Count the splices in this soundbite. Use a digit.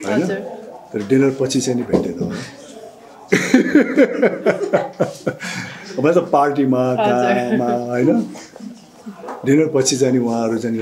0